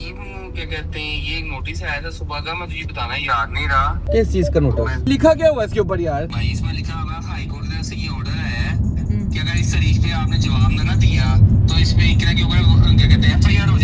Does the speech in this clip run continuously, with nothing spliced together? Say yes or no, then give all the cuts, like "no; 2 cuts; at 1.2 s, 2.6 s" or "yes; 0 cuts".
no; 2 cuts; at 4.0 s, 6.3 s